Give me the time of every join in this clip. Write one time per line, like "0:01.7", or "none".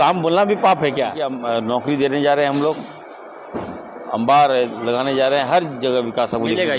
0:01.2